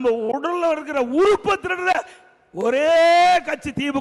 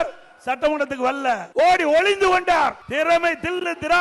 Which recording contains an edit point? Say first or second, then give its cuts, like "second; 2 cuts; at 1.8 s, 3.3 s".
second; 2 cuts; at 1.5 s, 2.8 s